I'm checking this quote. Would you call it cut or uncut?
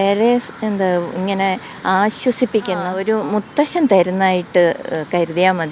cut